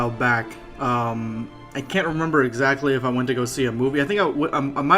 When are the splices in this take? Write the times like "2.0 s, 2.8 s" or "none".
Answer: 2.8 s